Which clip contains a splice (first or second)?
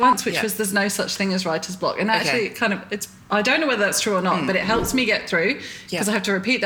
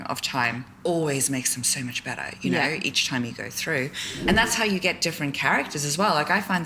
second